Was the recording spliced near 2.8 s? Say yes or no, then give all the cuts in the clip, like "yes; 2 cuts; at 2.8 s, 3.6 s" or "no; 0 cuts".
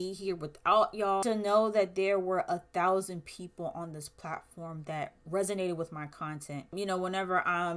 no; 2 cuts; at 1.2 s, 6.7 s